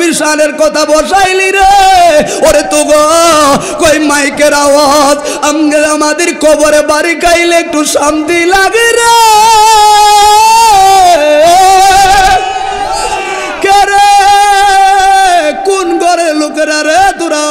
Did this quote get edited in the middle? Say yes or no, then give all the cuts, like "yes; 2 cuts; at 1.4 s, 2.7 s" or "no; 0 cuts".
no; 0 cuts